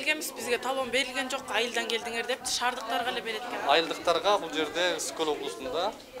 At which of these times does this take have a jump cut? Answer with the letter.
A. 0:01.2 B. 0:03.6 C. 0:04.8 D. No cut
B